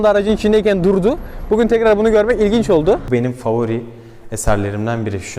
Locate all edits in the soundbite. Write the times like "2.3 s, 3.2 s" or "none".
3.0 s